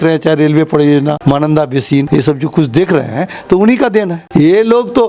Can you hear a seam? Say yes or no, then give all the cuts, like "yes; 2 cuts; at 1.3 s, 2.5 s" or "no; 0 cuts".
yes; 3 cuts; at 1.2 s, 2.1 s, 4.2 s